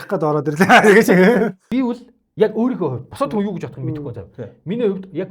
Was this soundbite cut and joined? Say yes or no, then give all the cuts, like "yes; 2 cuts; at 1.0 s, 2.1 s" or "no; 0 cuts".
yes; 1 cut; at 1.6 s